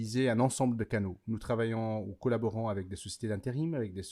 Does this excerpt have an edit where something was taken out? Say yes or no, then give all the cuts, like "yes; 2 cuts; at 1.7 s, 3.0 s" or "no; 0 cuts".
no; 0 cuts